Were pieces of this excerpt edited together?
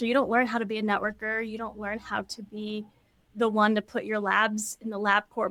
no; 0 cuts

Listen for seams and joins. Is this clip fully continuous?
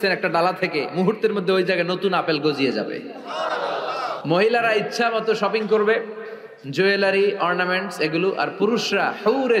no; 1 cut; at 4.2 s

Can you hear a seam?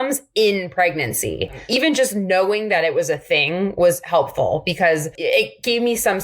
yes; 2 cuts; at 1.7 s, 5.2 s

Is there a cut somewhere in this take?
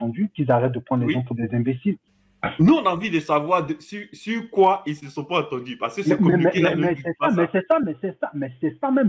yes; 1 cut; at 2.1 s

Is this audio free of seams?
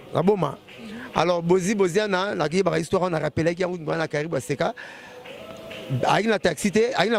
yes; 0 cuts

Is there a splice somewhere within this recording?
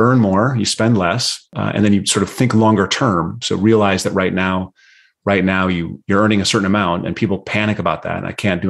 yes; 1 cut; at 1.5 s

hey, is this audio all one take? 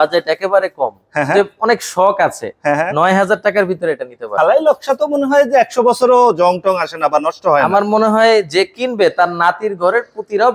no; 1 cut; at 4.3 s

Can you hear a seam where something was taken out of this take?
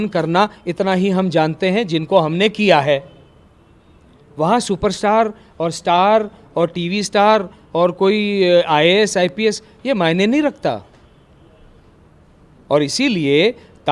no; 0 cuts

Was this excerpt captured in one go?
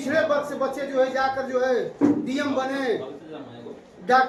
yes; 0 cuts

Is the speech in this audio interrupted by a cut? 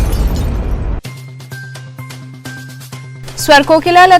yes; 1 cut; at 3.0 s

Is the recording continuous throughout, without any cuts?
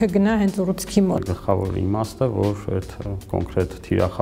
no; 1 cut; at 1.1 s

